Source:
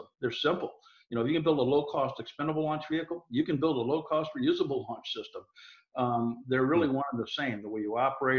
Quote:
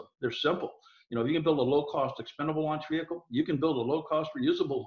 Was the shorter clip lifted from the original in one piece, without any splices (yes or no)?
yes